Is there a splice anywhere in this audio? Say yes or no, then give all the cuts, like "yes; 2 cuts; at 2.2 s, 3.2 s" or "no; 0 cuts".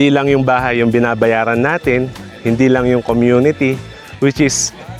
no; 0 cuts